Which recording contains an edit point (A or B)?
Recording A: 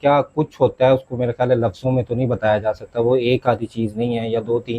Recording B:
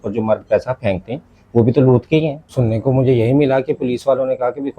B